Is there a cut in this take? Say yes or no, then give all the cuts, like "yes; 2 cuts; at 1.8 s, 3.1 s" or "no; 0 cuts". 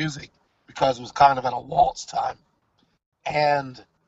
no; 0 cuts